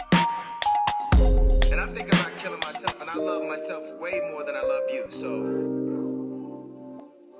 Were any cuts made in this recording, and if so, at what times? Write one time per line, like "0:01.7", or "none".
none